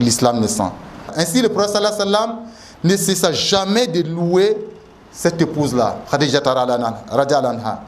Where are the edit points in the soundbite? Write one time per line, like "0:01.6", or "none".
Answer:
0:01.1